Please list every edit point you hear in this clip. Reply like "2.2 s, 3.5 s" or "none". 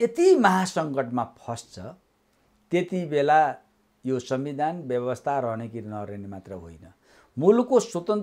none